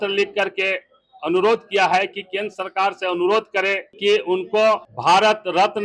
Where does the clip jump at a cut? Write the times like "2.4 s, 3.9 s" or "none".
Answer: 3.9 s, 4.9 s